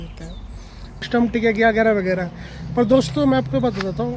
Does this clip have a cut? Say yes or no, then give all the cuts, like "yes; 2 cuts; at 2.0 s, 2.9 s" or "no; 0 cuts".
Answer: yes; 1 cut; at 1.0 s